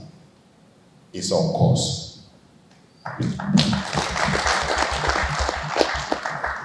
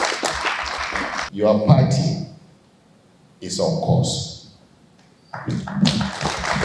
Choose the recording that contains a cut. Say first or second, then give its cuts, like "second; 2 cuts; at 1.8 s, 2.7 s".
second; 1 cut; at 1.2 s